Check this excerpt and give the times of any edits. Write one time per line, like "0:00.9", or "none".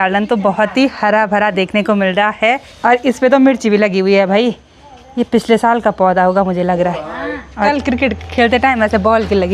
0:02.7
0:07.7